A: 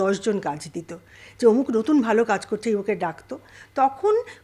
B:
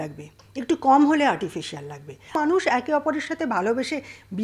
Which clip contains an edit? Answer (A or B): B